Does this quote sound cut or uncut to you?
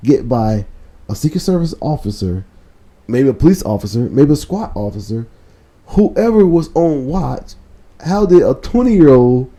uncut